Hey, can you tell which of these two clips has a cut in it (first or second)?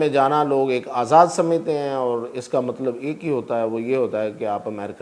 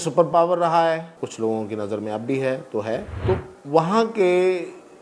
second